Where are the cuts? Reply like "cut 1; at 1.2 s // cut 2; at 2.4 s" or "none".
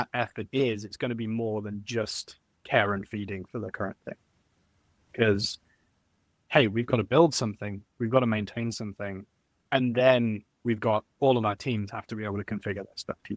none